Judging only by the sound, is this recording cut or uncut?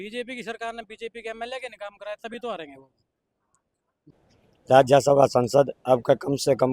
cut